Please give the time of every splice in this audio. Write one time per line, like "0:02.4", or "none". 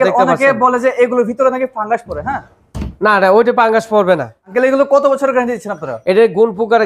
0:04.5